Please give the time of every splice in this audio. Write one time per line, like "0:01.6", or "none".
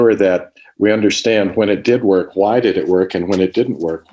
none